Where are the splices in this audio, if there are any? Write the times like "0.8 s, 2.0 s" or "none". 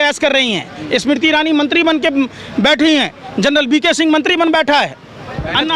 none

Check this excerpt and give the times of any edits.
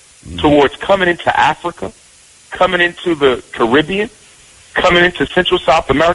none

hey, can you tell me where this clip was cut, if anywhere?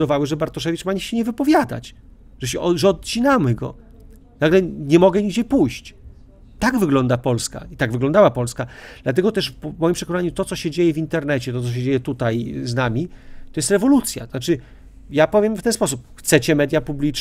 none

